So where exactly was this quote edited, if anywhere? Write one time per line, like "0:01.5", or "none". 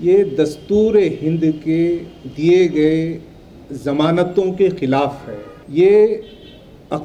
none